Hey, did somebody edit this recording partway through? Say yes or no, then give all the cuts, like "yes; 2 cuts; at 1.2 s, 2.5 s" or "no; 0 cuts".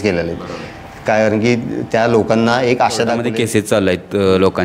yes; 1 cut; at 3.2 s